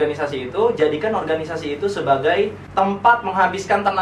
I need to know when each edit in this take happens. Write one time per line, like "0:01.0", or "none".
0:02.6